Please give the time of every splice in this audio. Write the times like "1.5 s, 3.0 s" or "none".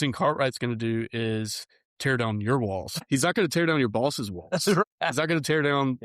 3.0 s, 4.8 s